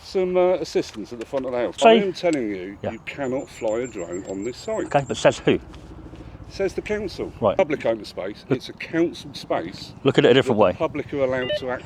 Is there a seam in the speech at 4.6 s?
no; 2 cuts; at 1.8 s, 7.6 s

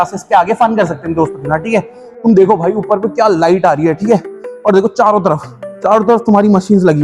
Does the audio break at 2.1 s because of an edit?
yes; 1 cut; at 2.1 s

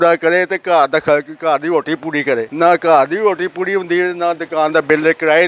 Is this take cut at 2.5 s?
yes; 1 cut; at 2.5 s

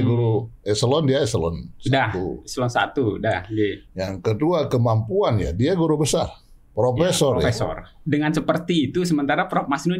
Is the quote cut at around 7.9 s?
yes; 1 cut; at 7.9 s

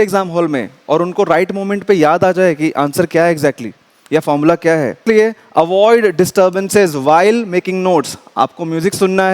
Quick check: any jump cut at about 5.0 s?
yes; 1 cut; at 5.0 s

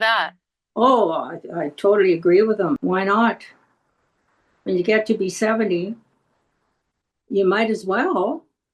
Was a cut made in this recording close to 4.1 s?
no; 1 cut; at 2.8 s

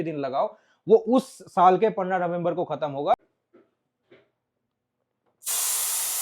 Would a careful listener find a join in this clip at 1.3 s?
no; 1 cut; at 3.4 s

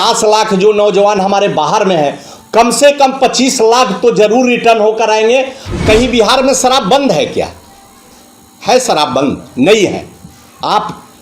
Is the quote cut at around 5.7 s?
yes; 1 cut; at 5.7 s

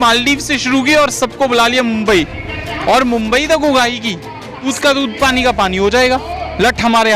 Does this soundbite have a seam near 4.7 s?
yes; 1 cut; at 4.7 s

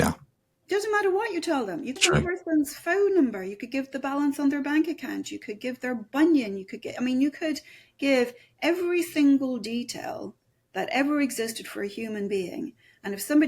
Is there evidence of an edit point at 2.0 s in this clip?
yes; 1 cut; at 2.0 s

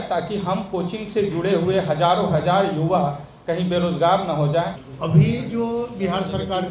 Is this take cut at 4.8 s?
yes; 1 cut; at 4.8 s

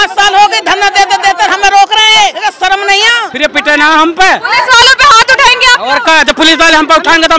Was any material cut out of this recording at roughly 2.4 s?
yes; 2 cuts; at 2.4 s, 3.2 s

